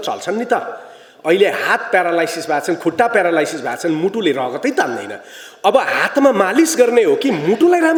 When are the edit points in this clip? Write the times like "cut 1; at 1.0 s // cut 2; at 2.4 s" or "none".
none